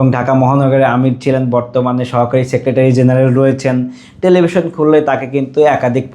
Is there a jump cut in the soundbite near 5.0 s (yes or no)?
no